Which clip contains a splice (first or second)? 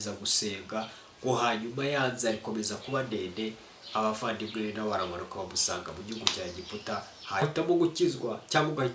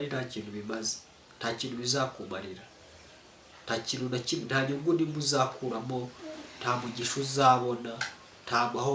first